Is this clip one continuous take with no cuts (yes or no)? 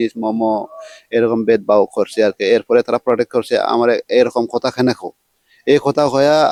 yes